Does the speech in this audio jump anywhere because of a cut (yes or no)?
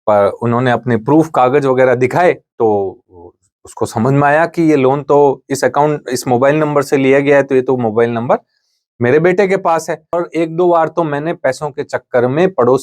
yes